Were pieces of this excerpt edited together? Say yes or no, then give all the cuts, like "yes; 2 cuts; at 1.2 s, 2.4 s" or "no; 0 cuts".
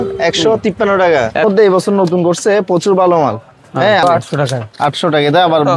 yes; 2 cuts; at 1.4 s, 4.0 s